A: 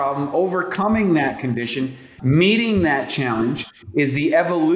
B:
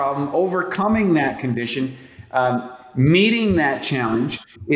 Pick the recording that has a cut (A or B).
A